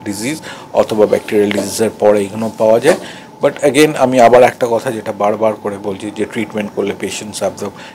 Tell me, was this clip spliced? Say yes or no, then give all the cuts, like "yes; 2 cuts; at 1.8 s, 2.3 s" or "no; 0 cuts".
no; 0 cuts